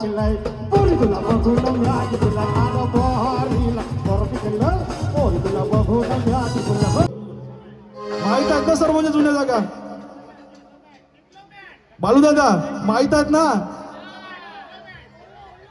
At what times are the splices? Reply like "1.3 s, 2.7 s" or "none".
7.1 s